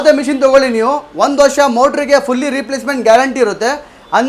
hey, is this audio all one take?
yes; 0 cuts

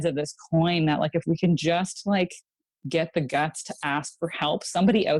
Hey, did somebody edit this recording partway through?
no; 0 cuts

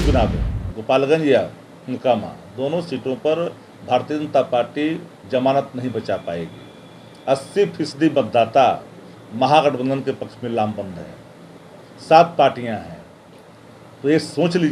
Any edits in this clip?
no; 0 cuts

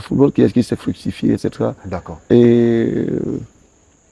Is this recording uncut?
yes; 0 cuts

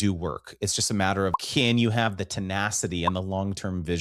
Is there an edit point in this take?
yes; 1 cut; at 1.3 s

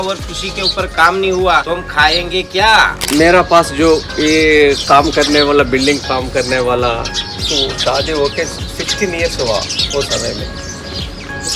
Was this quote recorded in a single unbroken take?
no; 2 cuts; at 1.6 s, 3.0 s

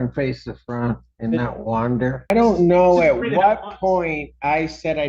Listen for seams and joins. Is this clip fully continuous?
no; 1 cut; at 2.3 s

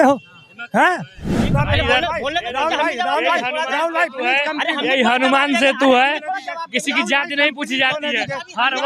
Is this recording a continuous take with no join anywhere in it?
no; 1 cut; at 1.3 s

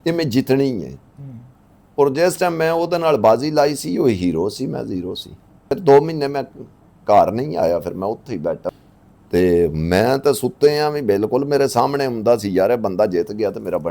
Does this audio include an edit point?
yes; 2 cuts; at 5.7 s, 8.7 s

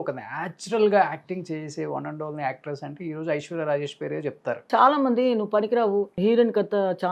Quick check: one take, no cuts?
no; 2 cuts; at 4.7 s, 6.1 s

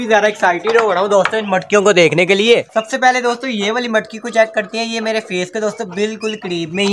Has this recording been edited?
no; 0 cuts

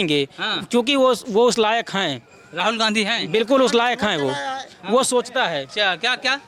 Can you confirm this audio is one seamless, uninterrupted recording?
yes; 0 cuts

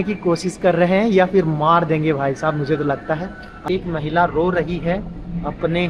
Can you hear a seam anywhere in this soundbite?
yes; 1 cut; at 3.7 s

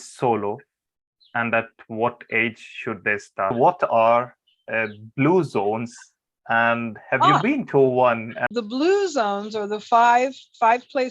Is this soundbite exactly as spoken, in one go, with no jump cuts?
no; 2 cuts; at 3.5 s, 8.5 s

